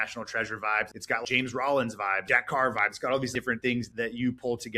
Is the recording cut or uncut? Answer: cut